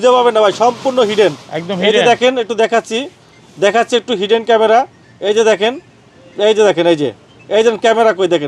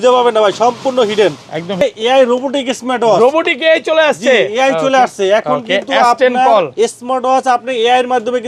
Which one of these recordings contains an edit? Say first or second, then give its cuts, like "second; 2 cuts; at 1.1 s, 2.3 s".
second; 1 cut; at 1.8 s